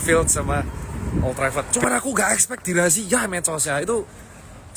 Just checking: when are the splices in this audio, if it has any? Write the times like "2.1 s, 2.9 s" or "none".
1.7 s